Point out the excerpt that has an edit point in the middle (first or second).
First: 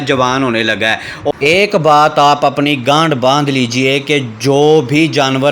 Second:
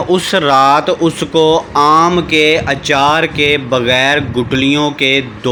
first